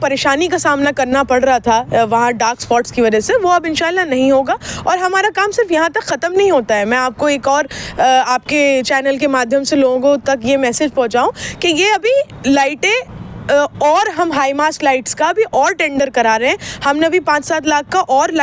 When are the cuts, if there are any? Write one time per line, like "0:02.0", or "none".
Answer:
none